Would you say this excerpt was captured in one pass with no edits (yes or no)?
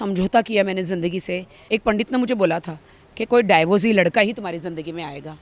no